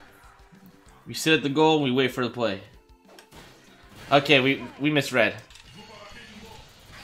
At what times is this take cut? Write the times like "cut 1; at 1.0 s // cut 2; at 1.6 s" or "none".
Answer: cut 1; at 5.4 s